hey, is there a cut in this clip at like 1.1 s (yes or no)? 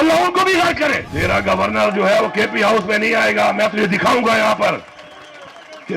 yes